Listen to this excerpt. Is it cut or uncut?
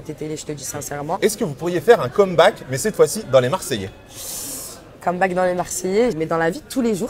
cut